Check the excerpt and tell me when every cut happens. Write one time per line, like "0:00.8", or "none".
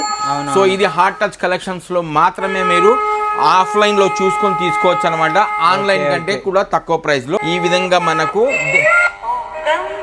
0:07.4